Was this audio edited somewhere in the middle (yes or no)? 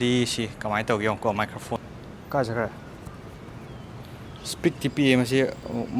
yes